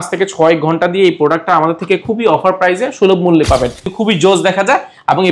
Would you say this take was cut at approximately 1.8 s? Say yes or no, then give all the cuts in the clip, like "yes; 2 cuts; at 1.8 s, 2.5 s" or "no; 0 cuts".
no; 1 cut; at 4.1 s